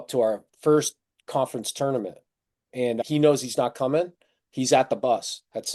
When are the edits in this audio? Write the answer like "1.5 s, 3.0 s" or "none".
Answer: none